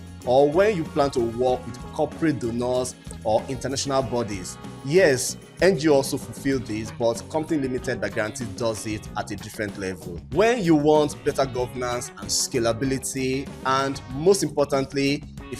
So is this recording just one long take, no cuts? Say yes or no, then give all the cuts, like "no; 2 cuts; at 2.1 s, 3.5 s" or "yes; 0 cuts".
yes; 0 cuts